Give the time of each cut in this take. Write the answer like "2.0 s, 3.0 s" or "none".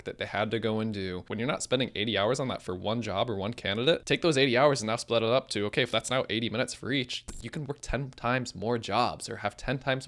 1.2 s, 4.0 s